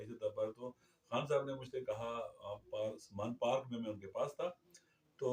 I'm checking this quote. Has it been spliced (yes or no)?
no